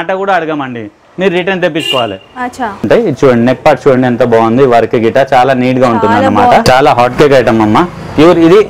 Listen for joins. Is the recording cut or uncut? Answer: cut